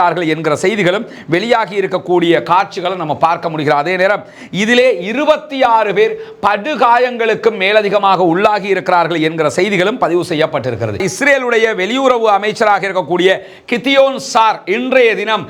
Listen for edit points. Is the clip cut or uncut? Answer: cut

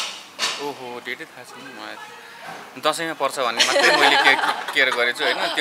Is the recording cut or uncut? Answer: uncut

